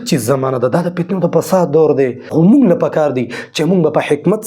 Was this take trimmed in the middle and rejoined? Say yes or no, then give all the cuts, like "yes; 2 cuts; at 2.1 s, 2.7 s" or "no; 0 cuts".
yes; 1 cut; at 2.3 s